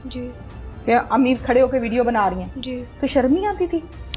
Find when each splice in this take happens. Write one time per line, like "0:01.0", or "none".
none